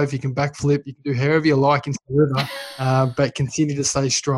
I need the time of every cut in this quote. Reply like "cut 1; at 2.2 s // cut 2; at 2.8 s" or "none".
none